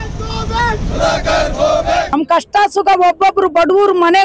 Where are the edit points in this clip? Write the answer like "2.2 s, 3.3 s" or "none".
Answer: 2.1 s